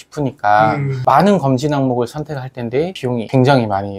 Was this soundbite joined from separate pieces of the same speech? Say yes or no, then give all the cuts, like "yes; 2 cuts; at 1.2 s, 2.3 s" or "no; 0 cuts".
yes; 1 cut; at 2.9 s